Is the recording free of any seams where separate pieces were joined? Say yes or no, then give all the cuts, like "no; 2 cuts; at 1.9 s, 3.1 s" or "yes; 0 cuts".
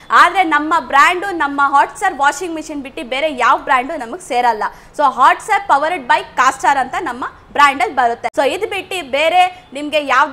no; 1 cut; at 8.3 s